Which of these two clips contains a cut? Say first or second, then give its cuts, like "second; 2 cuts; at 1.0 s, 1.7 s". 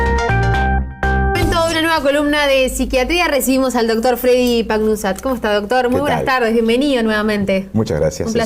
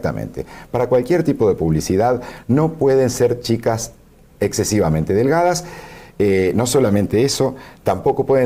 first; 1 cut; at 1.3 s